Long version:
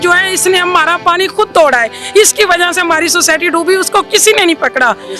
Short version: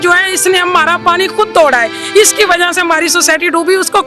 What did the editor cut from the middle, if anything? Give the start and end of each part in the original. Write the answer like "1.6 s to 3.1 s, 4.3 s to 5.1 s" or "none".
none